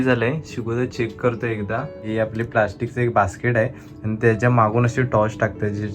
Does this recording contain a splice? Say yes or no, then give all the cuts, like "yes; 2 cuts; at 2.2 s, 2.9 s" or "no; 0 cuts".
yes; 1 cut; at 2.0 s